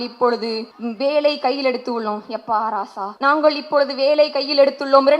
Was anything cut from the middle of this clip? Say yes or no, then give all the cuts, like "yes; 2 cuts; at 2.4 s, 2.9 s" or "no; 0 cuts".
yes; 2 cuts; at 1.0 s, 3.2 s